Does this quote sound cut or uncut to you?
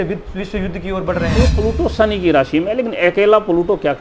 cut